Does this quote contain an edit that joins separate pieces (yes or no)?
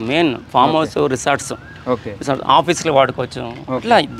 no